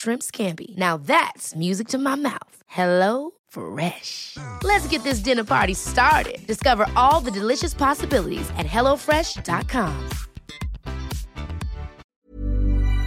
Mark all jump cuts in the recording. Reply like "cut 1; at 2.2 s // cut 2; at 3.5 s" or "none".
cut 1; at 12.0 s